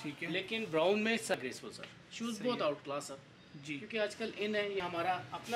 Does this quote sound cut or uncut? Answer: cut